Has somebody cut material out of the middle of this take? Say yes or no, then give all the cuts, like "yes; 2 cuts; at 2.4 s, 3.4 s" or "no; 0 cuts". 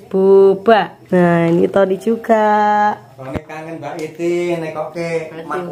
yes; 1 cut; at 1.0 s